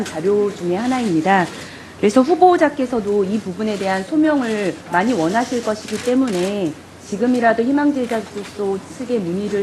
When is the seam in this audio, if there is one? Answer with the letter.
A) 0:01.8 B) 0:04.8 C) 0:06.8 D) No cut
C